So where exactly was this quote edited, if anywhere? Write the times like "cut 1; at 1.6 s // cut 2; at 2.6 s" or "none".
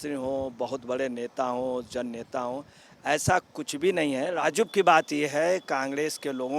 cut 1; at 4.3 s